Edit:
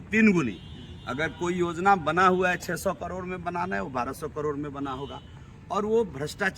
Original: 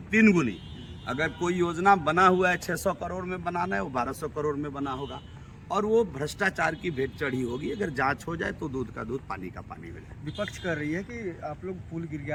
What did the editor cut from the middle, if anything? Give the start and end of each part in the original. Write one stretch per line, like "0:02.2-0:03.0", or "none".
none